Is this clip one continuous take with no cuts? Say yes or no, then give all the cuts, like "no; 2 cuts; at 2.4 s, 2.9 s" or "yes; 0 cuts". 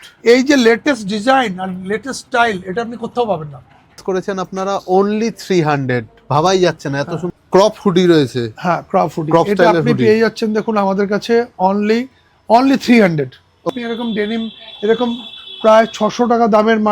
no; 3 cuts; at 4.0 s, 7.2 s, 13.7 s